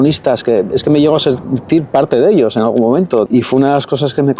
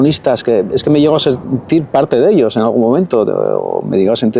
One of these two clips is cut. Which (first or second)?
first